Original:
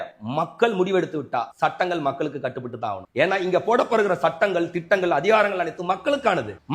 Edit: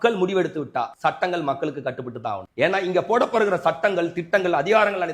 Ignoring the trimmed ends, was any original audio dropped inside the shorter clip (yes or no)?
no